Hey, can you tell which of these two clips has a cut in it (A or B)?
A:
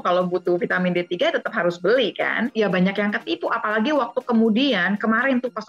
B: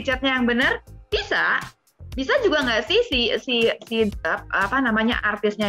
A